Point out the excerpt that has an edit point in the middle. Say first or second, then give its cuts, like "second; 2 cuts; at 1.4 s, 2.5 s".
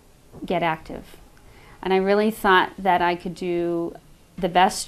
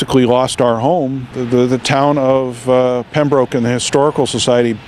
second; 1 cut; at 1.4 s